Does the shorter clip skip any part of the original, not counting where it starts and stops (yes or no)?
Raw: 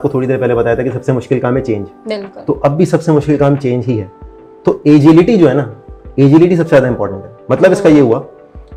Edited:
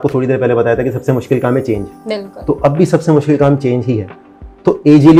no